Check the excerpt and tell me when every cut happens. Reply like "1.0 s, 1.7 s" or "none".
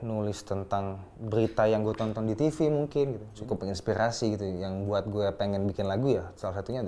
3.3 s